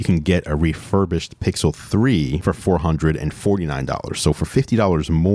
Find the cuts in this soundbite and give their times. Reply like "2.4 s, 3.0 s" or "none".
none